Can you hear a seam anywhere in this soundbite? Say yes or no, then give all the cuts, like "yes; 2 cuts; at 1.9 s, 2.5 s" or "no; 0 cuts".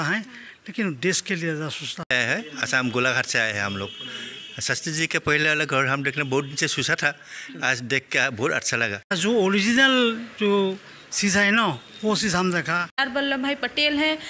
yes; 3 cuts; at 2.1 s, 9.2 s, 12.9 s